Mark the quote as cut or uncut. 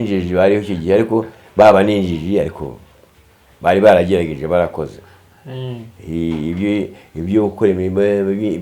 uncut